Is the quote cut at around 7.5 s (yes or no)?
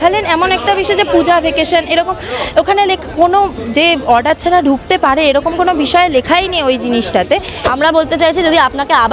yes